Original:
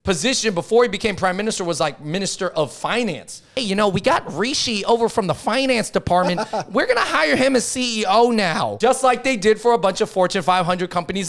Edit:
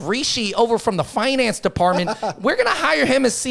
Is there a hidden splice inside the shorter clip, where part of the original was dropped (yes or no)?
no